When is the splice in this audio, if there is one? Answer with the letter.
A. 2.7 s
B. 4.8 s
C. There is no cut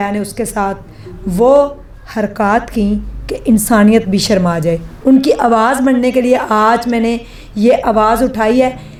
C